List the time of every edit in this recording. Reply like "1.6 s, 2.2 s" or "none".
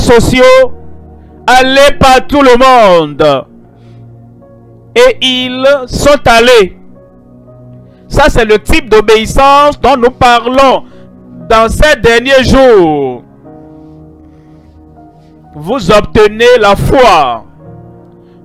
3.5 s, 4.9 s